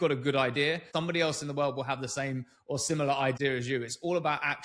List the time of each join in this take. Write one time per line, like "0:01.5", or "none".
0:00.8
0:03.4